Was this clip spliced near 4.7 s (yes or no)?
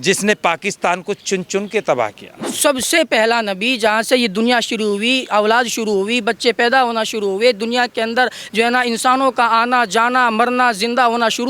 no